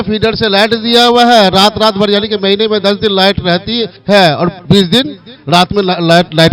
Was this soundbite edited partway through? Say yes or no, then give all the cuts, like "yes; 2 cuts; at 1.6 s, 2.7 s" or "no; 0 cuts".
yes; 2 cuts; at 3.9 s, 4.6 s